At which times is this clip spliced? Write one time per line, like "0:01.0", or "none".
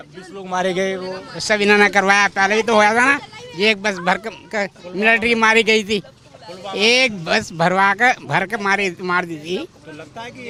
none